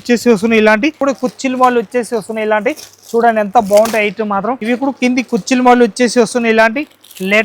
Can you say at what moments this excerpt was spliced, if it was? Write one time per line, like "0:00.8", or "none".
0:01.0
0:04.6